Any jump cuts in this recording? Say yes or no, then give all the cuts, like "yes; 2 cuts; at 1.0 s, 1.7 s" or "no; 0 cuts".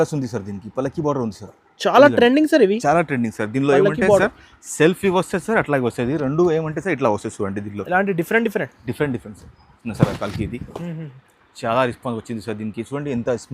yes; 1 cut; at 9.8 s